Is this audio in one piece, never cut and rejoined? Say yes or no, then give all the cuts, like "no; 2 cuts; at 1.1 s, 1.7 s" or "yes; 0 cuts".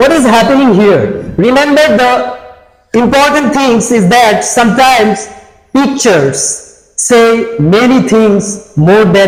yes; 0 cuts